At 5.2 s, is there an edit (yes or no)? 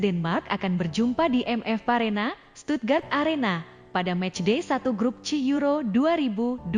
no